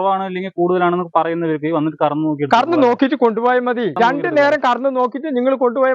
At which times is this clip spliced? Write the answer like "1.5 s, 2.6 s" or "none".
3.9 s